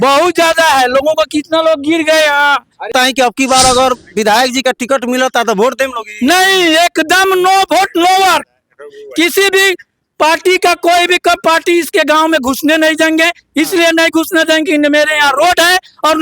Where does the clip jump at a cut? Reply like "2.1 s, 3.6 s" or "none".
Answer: 2.9 s